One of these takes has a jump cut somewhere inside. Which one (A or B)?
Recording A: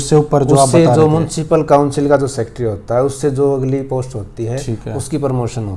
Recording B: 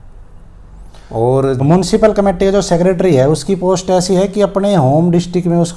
B